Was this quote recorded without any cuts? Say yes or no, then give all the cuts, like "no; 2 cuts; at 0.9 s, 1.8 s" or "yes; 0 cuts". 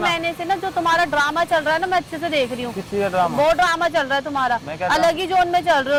yes; 0 cuts